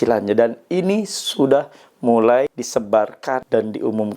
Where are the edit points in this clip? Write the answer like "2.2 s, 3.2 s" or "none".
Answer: 3.0 s